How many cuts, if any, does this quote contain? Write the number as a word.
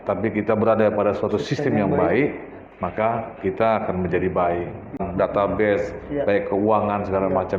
one